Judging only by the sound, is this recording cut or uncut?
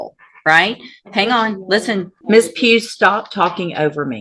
cut